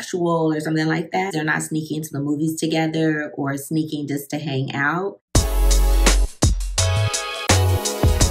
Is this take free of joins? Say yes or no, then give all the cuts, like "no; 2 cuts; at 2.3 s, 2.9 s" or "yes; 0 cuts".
no; 2 cuts; at 1.3 s, 5.2 s